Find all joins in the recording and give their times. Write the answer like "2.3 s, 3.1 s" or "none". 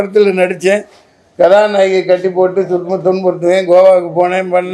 none